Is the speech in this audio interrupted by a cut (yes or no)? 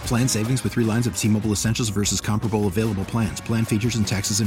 no